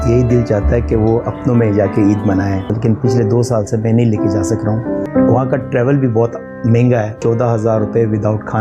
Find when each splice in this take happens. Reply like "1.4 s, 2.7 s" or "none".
2.7 s, 5.0 s, 7.2 s